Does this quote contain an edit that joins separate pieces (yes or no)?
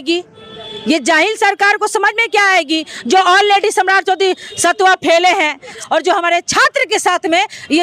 yes